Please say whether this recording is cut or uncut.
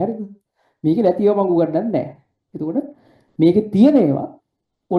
uncut